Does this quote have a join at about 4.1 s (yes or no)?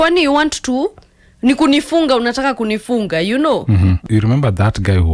yes